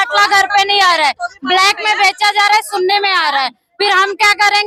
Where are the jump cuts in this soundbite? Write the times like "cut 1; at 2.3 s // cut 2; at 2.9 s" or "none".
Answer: none